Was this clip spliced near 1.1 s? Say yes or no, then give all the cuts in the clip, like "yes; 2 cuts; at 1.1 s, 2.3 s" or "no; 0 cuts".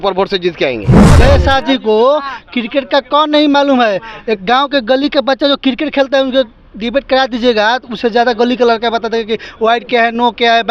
yes; 1 cut; at 1.1 s